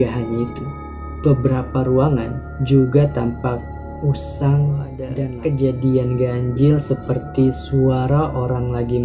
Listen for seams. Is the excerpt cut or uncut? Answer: cut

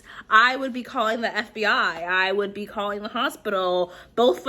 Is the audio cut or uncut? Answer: uncut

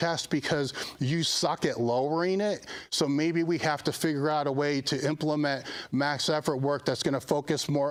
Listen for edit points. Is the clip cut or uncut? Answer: uncut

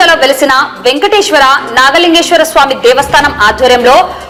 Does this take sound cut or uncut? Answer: uncut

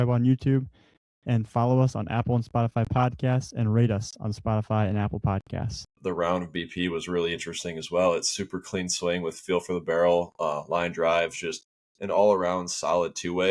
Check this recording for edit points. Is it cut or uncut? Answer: cut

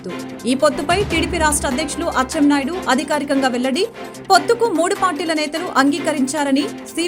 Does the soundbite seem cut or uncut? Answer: uncut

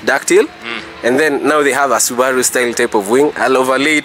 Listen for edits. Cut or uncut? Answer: uncut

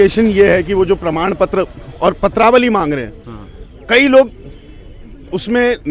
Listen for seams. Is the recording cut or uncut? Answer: uncut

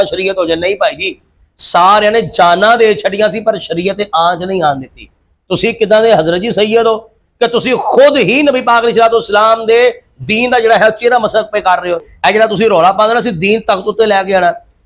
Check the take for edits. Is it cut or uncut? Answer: cut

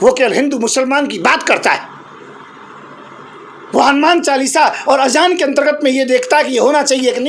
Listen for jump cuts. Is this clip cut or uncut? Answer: uncut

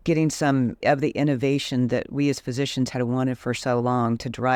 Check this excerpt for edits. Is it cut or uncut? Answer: uncut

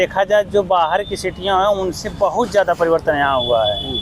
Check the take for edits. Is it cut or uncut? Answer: uncut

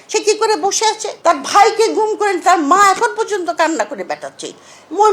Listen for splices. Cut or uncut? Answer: cut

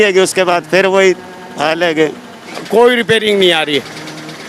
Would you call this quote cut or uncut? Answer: cut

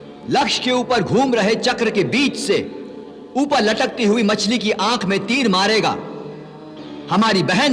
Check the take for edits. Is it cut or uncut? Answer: uncut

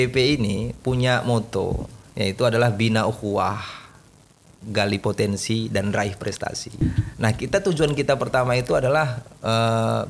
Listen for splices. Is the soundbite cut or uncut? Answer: cut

